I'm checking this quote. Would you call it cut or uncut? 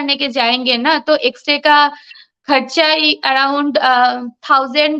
uncut